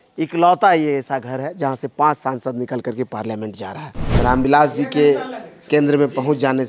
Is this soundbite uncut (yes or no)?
no